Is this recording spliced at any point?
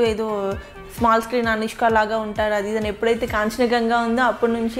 no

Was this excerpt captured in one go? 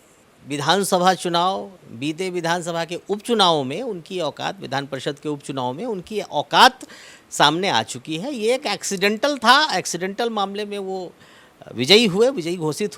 yes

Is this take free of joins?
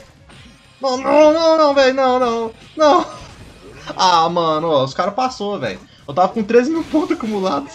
yes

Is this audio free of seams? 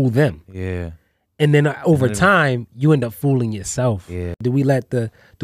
no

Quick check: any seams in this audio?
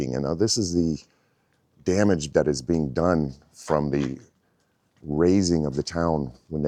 no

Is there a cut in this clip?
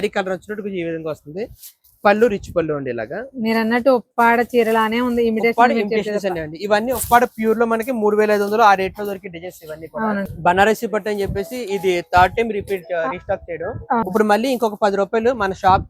yes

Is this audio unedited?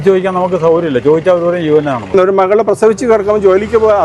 no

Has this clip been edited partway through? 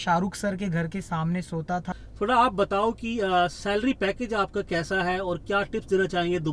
yes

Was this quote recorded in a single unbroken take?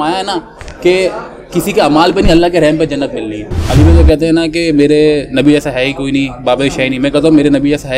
no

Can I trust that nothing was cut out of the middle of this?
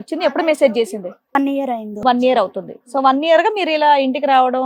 yes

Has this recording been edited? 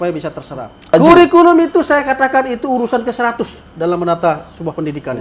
yes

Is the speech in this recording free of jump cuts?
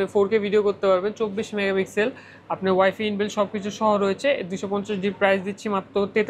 yes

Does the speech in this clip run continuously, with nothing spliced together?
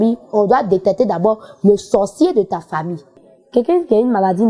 no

